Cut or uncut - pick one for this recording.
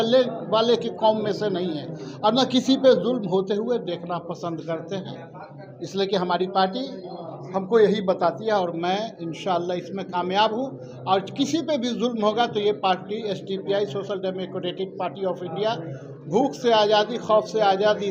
uncut